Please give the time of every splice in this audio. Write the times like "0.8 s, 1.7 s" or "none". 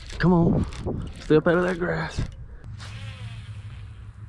2.6 s

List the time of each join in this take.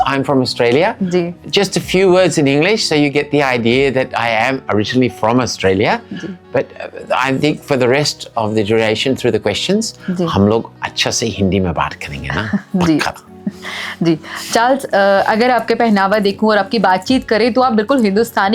none

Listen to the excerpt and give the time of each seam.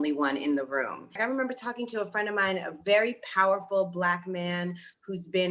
1.1 s

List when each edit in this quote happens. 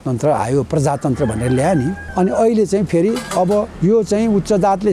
2.0 s, 3.7 s

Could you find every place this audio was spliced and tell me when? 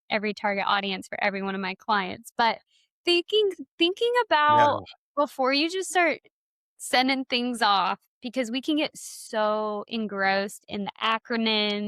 none

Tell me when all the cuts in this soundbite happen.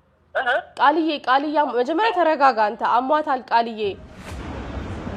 none

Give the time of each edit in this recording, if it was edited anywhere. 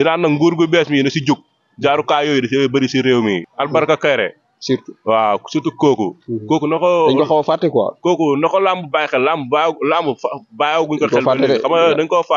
3.4 s

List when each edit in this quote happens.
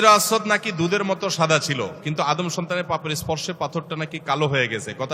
none

